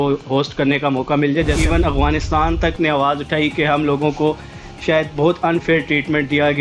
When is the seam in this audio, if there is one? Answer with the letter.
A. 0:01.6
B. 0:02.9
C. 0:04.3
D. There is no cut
A